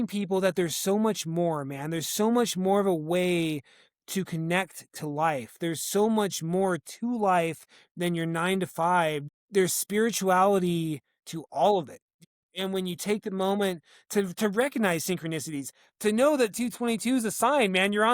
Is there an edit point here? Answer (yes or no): yes